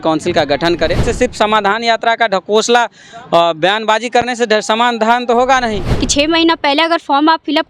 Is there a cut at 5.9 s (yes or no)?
yes